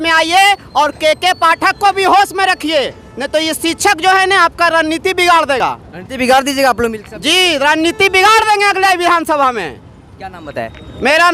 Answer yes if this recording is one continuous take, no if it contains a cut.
yes